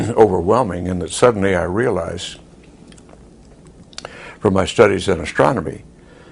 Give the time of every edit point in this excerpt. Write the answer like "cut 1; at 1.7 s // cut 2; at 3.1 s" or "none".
cut 1; at 3.8 s